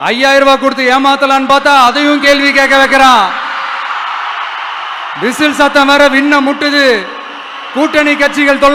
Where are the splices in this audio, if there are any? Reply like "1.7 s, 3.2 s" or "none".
none